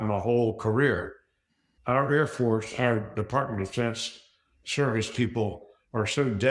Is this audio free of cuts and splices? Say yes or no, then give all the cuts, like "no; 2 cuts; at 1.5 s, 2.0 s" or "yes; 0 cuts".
no; 1 cut; at 4.5 s